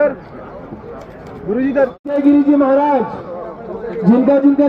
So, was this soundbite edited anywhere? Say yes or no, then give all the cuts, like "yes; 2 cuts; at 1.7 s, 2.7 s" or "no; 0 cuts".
yes; 1 cut; at 2.0 s